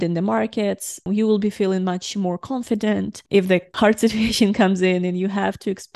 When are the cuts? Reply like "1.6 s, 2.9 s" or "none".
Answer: 1.0 s, 3.7 s